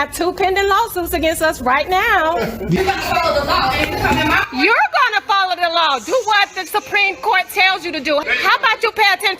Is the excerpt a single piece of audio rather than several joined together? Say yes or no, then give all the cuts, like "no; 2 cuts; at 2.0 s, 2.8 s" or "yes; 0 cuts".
no; 1 cut; at 2.8 s